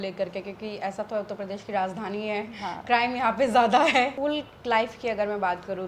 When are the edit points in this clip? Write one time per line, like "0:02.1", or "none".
0:04.1